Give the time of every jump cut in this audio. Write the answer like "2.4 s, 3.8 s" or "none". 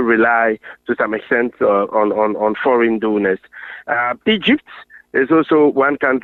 none

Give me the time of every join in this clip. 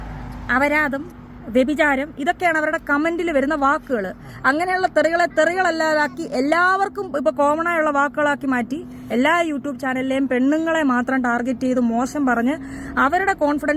none

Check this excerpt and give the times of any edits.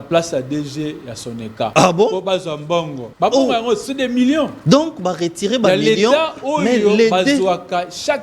1.7 s, 3.0 s, 4.6 s

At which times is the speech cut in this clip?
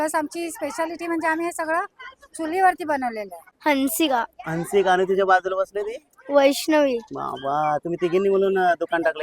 3.4 s

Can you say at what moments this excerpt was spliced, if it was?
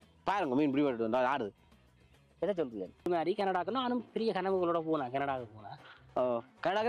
3.1 s

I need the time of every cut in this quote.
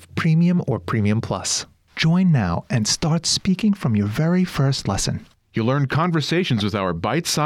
1.6 s

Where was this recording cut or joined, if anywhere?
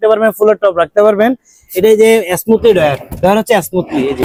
none

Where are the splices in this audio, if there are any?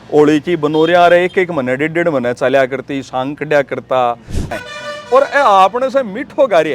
4.5 s

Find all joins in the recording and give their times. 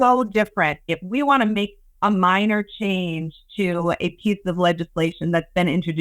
0.9 s

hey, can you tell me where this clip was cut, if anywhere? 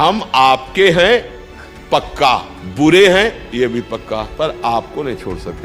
2.6 s, 4.3 s

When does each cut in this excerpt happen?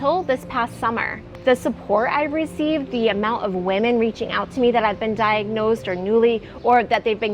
1.2 s

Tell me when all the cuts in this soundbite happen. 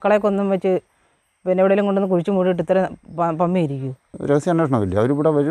4.1 s

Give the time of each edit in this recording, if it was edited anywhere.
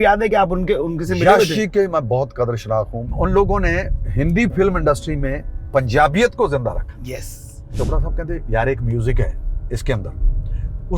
3.0 s, 4.0 s, 7.8 s

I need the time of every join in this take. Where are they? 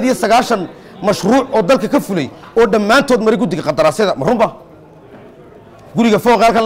none

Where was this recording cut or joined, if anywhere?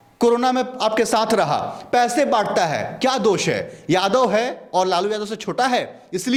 none

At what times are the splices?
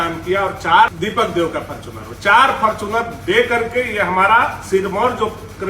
0.9 s

